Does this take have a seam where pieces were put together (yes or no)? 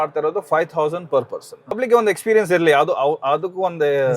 yes